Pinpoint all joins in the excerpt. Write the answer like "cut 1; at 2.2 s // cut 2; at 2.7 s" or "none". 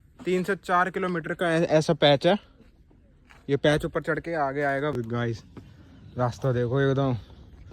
cut 1; at 4.9 s